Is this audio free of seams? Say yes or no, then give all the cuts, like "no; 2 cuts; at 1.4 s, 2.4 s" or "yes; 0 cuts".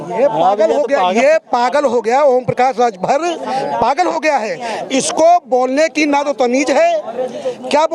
yes; 0 cuts